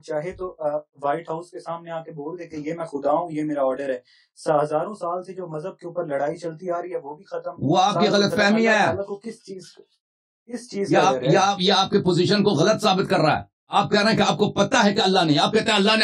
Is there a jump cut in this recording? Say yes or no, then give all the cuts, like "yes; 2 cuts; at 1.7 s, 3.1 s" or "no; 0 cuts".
no; 0 cuts